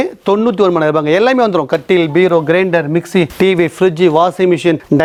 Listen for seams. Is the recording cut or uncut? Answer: uncut